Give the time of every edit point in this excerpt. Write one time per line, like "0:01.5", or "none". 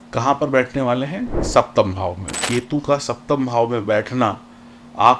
0:02.4